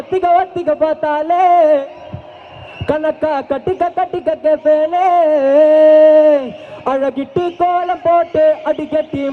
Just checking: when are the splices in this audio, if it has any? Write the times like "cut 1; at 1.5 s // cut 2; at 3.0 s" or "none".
none